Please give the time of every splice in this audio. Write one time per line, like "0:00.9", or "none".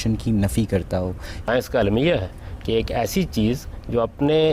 0:01.4